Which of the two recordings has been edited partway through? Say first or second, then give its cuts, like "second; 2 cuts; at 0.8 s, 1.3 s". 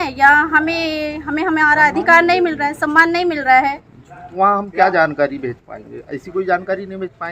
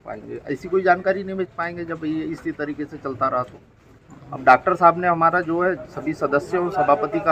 first; 1 cut; at 4.3 s